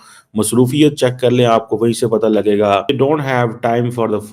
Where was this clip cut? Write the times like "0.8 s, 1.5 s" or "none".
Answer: 2.9 s

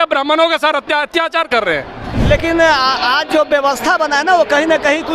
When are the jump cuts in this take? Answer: 2.1 s

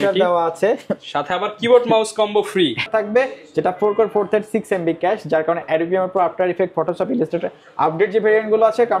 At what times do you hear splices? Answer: 2.9 s

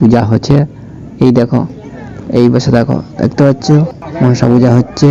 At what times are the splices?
none

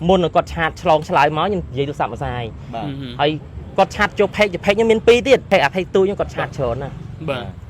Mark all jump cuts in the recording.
5.5 s

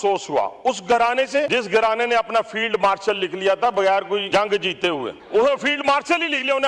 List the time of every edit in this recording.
1.5 s, 4.3 s, 5.2 s

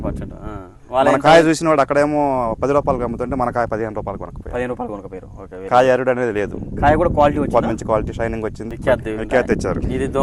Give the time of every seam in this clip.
8.7 s

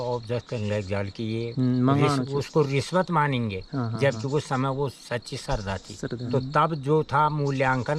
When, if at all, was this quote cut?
6.3 s

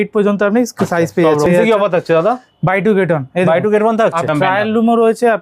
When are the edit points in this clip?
1.5 s, 4.3 s

